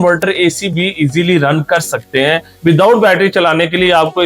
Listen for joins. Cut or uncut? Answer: cut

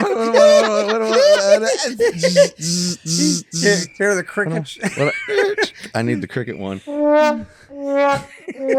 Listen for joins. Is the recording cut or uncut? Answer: uncut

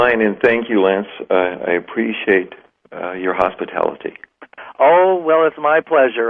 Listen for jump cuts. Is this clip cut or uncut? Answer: cut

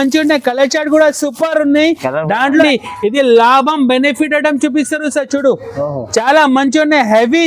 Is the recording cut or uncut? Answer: cut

